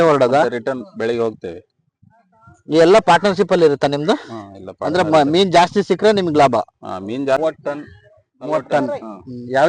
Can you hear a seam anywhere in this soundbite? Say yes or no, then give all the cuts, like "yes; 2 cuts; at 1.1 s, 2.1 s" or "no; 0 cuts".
yes; 1 cut; at 7.4 s